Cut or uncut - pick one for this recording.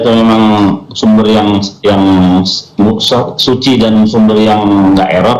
uncut